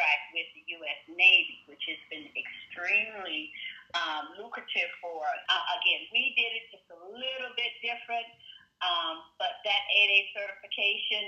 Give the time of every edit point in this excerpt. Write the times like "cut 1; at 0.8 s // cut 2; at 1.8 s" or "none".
cut 1; at 5.4 s